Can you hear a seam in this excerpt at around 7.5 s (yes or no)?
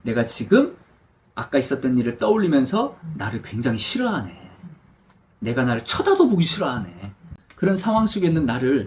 yes